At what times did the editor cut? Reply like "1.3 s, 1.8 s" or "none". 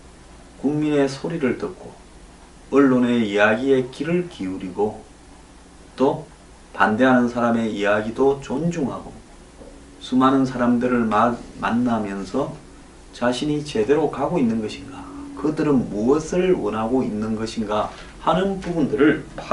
none